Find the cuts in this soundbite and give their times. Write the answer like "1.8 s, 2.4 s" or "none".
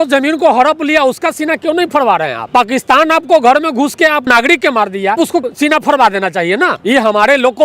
none